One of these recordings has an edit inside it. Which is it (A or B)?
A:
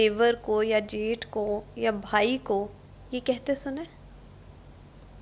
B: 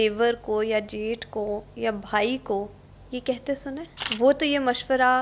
B